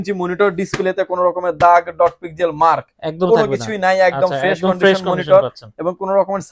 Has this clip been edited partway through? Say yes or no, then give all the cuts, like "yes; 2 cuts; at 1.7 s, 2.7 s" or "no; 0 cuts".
no; 0 cuts